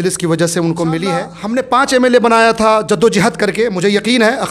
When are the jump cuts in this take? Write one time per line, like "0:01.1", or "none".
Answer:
0:01.4